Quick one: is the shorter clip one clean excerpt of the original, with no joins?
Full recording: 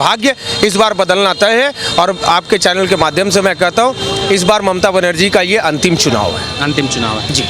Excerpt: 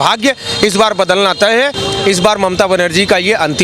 no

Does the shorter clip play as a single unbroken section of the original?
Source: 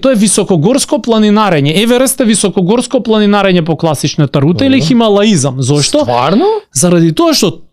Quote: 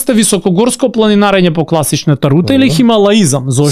yes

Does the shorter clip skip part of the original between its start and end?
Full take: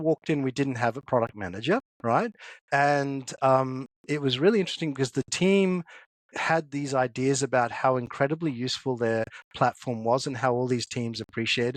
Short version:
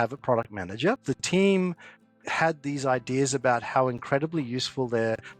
yes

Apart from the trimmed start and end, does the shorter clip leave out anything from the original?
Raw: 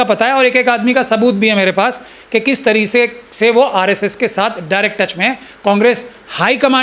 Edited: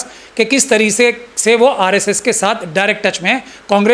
no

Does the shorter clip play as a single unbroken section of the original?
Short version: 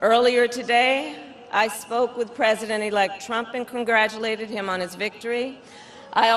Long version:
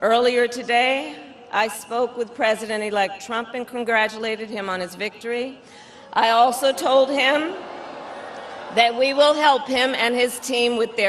yes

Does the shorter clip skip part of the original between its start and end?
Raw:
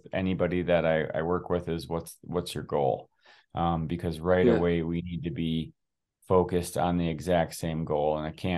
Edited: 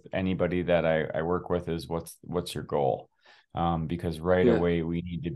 no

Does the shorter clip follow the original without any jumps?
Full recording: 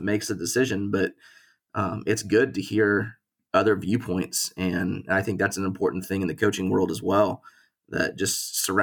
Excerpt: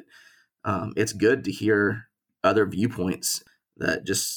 no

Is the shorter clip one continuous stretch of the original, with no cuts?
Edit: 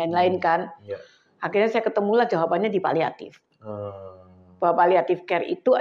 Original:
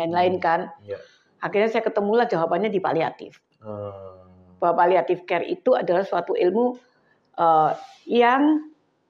yes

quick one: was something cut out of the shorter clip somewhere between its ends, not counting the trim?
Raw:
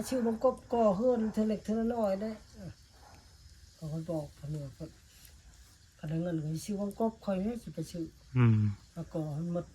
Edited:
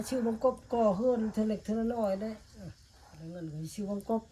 yes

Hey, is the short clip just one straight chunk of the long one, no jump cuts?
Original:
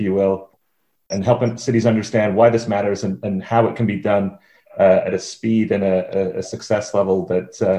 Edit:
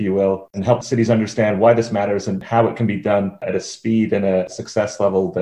no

